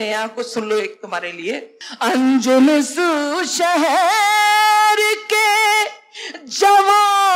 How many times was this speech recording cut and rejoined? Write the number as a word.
one